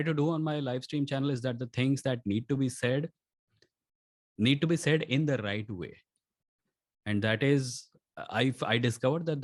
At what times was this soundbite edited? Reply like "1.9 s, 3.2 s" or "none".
none